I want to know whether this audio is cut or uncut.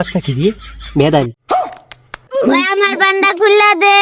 cut